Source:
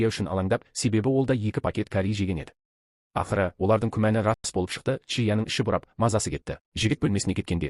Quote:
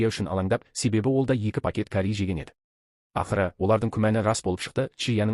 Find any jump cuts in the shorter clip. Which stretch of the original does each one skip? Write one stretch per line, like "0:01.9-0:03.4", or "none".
0:04.4-0:04.5